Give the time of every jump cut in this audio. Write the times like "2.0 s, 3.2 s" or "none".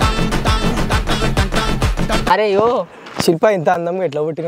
2.3 s, 3.4 s